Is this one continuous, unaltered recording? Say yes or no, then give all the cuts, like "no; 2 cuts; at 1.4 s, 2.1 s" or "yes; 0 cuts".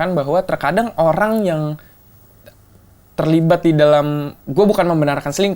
yes; 0 cuts